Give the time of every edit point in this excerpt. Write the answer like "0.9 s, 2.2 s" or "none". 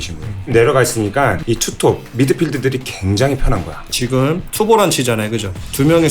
1.4 s, 3.9 s